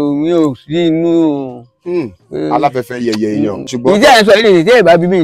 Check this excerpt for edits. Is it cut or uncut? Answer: cut